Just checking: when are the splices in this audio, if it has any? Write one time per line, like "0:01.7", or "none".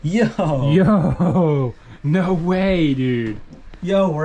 none